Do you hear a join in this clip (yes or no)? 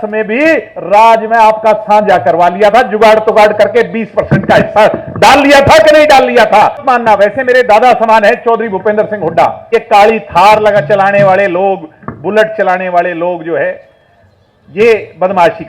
yes